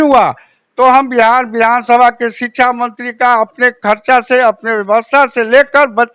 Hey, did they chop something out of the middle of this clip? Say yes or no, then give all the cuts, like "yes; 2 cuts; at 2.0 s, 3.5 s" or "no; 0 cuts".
no; 0 cuts